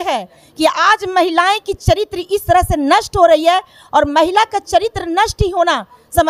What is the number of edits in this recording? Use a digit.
0